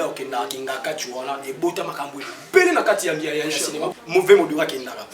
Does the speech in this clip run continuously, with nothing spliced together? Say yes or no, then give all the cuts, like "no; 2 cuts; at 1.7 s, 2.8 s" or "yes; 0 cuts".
no; 1 cut; at 3.8 s